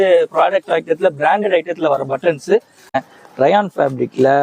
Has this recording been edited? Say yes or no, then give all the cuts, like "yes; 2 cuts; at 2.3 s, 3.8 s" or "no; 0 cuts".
yes; 1 cut; at 2.9 s